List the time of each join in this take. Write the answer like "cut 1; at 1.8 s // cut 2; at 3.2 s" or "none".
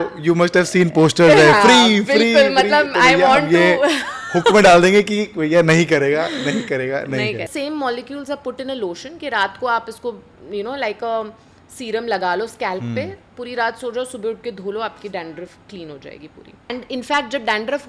cut 1; at 7.5 s // cut 2; at 16.7 s